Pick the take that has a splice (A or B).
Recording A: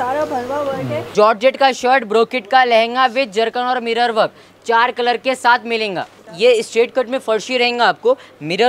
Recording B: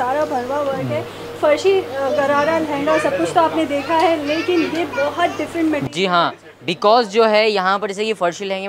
A